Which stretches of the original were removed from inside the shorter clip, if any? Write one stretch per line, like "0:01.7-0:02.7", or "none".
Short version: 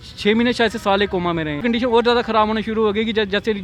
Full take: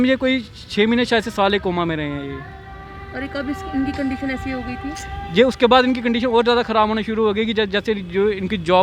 0:02.1-0:06.0